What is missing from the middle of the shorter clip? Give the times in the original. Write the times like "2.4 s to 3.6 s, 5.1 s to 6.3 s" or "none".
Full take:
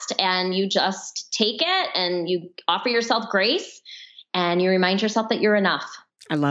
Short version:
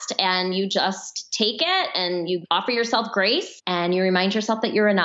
2.4 s to 2.6 s, 3.7 s to 4.2 s